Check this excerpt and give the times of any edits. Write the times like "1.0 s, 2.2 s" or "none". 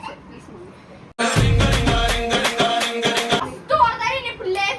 3.4 s